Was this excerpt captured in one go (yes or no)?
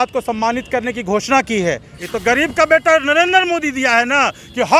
no